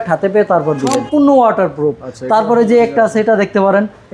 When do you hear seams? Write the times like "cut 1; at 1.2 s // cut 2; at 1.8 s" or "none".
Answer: cut 1; at 1.0 s